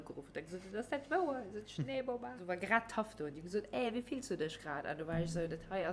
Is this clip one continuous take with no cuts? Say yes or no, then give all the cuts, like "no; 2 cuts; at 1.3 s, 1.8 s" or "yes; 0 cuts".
no; 1 cut; at 2.4 s